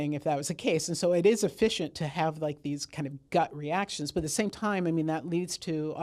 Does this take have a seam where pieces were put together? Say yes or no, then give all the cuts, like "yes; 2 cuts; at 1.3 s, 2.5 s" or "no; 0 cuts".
no; 0 cuts